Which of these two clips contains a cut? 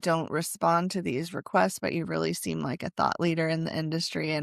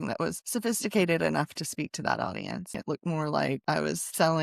second; 2 cuts; at 2.7 s, 3.7 s

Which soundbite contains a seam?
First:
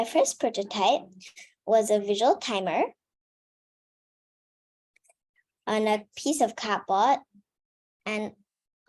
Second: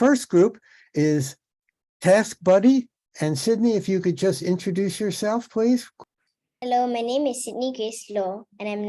second; 1 cut; at 5.9 s

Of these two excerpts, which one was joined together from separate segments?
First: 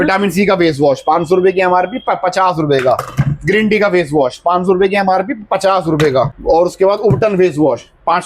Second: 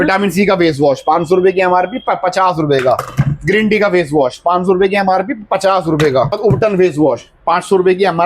second; 1 cut; at 6.4 s

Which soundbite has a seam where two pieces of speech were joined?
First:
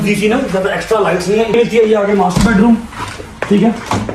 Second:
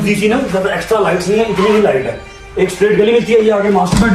first; 1 cut; at 1.5 s

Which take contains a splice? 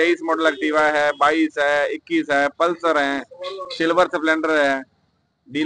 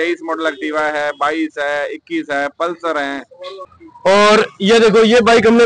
second; 1 cut; at 3.7 s

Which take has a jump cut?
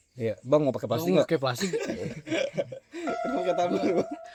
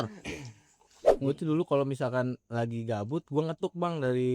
second; 1 cut; at 1.1 s

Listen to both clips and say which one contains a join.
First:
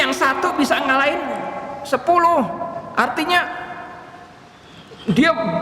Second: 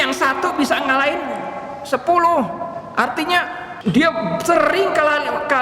second; 1 cut; at 3.7 s

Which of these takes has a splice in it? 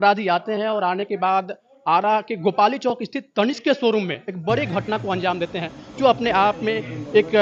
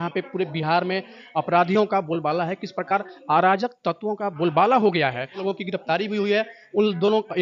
second; 1 cut; at 5.4 s

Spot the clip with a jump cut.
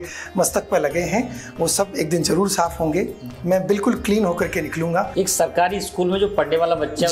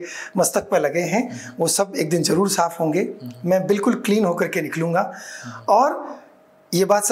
first; 1 cut; at 5.1 s

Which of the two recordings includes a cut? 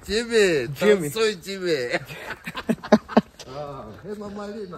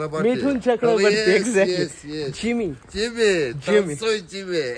first; 1 cut; at 3.3 s

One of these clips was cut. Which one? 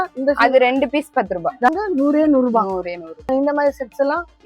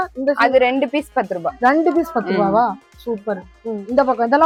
first; 2 cuts; at 1.7 s, 3.3 s

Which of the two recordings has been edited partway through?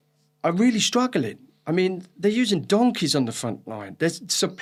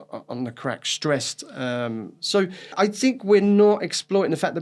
second; 1 cut; at 2.7 s

